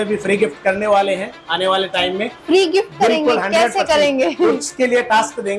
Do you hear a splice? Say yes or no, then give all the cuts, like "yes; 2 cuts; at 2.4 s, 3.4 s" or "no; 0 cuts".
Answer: no; 0 cuts